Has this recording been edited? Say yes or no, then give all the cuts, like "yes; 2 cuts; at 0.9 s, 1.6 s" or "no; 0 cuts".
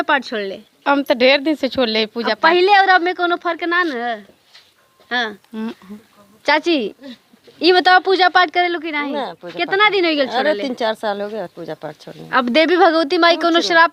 no; 0 cuts